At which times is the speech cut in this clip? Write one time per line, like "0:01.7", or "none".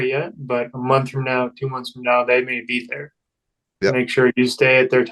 none